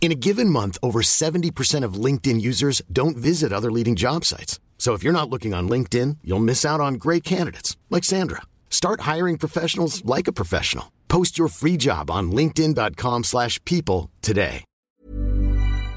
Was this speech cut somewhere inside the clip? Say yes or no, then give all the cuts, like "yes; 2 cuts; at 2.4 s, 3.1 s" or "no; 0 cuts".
yes; 1 cut; at 14.8 s